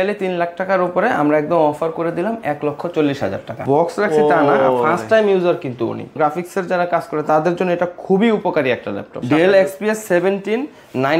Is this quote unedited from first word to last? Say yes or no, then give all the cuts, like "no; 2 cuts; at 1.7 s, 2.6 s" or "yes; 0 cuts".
no; 3 cuts; at 3.5 s, 6.2 s, 9.2 s